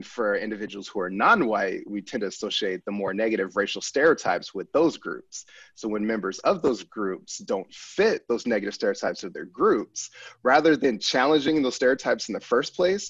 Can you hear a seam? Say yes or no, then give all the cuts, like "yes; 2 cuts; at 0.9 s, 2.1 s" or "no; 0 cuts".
no; 0 cuts